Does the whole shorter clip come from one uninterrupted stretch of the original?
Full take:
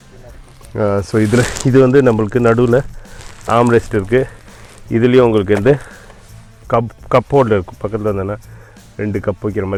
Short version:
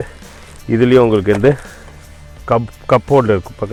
yes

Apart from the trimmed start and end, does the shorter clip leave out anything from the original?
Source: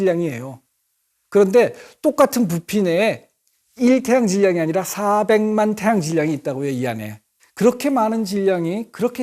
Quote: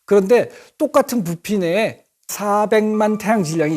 yes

